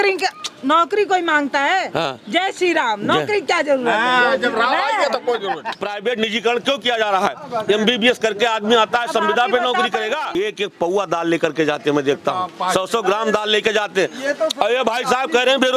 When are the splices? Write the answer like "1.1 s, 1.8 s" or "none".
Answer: 5.7 s, 10.4 s